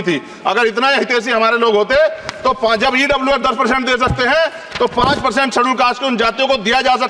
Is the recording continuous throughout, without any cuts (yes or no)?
yes